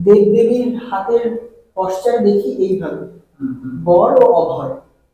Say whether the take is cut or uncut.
uncut